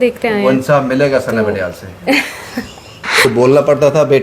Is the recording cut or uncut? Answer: cut